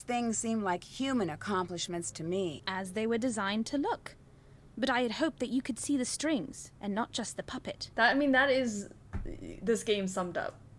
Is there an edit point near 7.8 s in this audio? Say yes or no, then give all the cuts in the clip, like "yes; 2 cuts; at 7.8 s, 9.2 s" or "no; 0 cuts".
yes; 2 cuts; at 2.6 s, 7.8 s